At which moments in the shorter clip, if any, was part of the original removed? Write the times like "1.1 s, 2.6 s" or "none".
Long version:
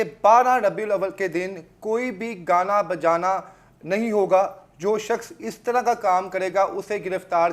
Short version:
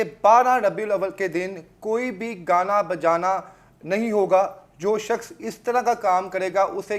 none